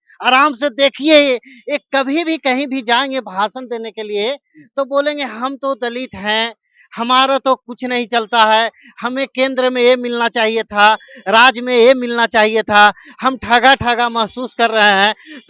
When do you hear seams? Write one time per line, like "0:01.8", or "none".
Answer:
none